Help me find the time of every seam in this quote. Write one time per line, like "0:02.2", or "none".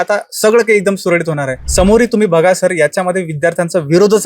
0:01.5

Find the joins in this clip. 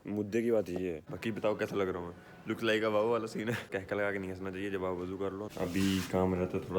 0:01.1
0:03.7
0:05.5

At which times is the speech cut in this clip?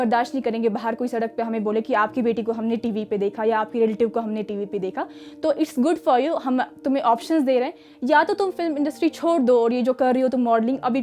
none

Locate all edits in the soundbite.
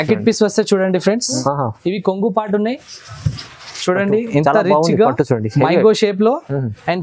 0:01.4

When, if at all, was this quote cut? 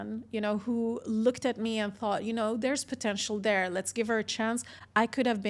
none

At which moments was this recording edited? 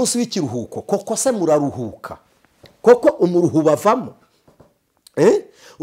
none

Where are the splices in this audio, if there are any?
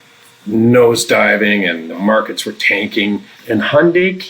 0:01.9
0:03.3

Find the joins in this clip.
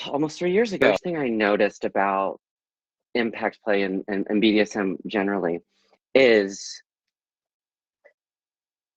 0:01.0

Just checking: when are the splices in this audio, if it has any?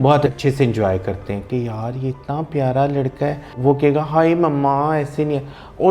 0:01.5

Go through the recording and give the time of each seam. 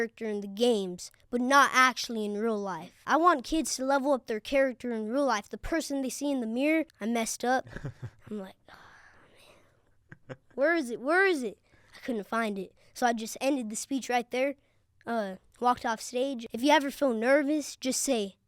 0:03.0
0:06.9
0:16.4

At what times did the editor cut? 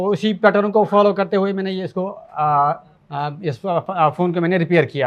0:03.0

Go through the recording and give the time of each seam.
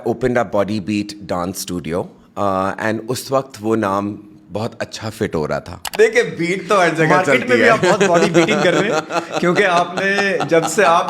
0:05.8

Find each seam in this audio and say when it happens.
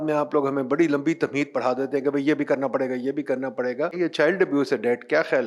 0:03.9

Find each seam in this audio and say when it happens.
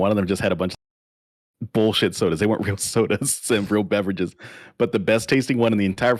none

